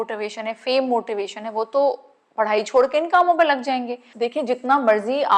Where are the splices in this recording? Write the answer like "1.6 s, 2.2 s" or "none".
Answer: 4.1 s